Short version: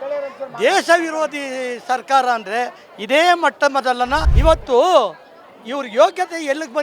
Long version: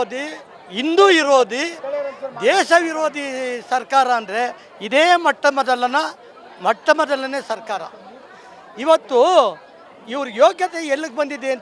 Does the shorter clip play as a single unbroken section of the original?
no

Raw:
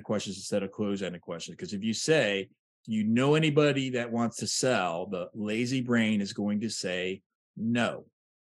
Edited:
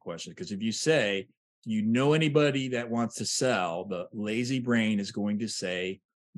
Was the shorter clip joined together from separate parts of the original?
no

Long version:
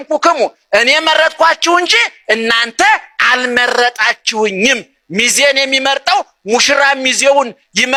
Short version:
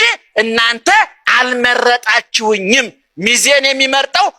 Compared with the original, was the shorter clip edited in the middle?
no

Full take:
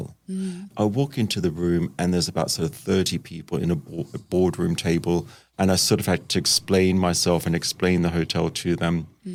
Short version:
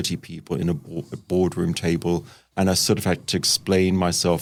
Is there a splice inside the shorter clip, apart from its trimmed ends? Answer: no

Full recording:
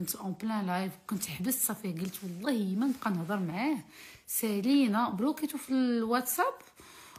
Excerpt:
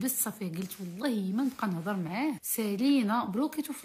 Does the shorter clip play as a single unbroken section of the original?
no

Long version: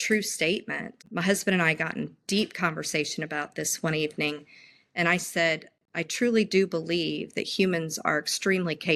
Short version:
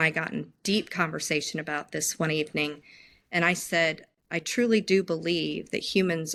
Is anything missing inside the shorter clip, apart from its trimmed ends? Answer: no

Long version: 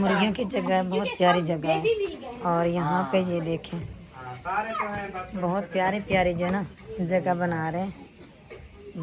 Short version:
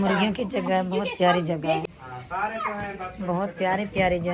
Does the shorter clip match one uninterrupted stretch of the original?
no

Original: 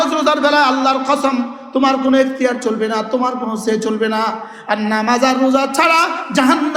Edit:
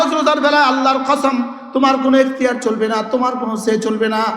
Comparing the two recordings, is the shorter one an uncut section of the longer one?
yes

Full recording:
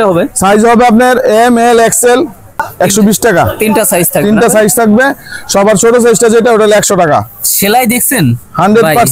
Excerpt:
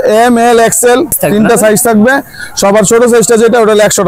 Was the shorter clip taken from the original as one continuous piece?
no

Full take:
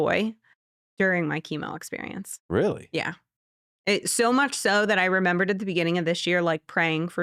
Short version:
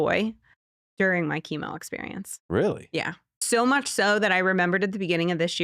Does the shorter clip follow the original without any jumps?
no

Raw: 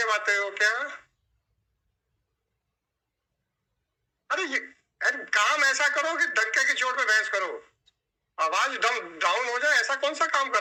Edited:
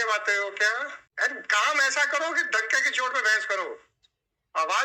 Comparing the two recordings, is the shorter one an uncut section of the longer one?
no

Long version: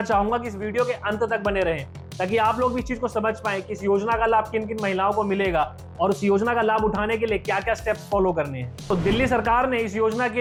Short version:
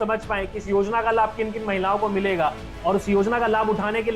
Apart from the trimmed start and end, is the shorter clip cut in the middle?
no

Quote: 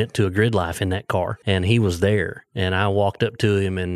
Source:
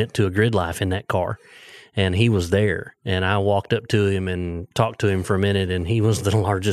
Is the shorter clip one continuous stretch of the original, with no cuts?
no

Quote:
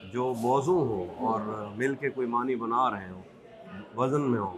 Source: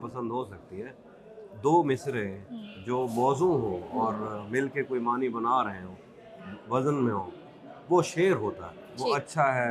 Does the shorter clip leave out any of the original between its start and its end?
no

